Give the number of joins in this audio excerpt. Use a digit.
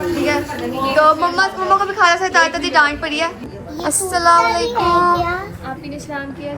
1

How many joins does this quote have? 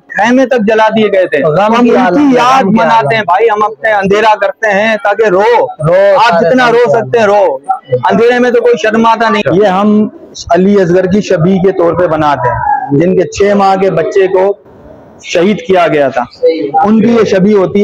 1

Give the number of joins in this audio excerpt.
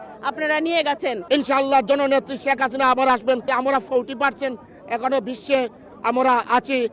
2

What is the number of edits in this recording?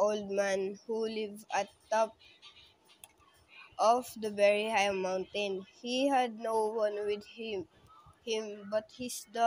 2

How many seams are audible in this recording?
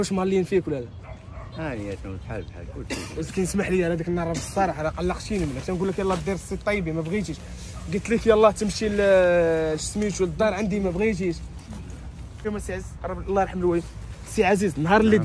1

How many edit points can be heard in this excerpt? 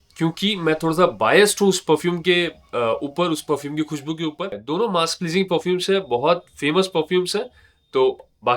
1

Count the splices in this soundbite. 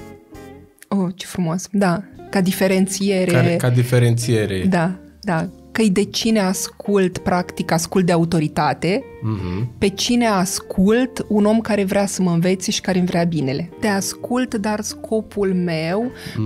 1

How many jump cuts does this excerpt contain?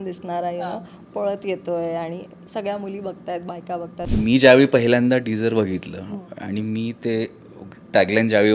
1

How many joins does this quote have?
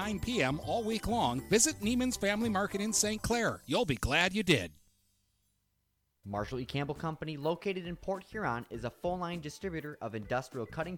1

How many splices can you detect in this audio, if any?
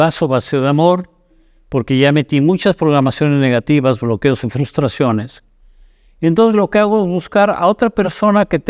0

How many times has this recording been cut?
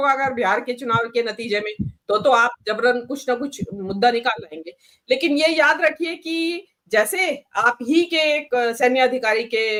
0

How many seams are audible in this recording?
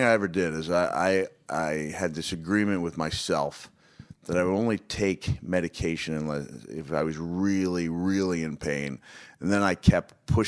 1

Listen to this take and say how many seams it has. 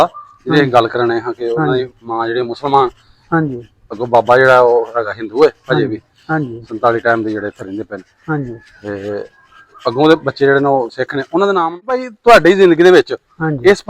1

